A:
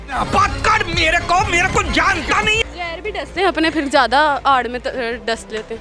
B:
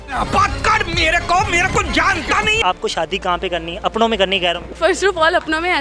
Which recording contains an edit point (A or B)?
B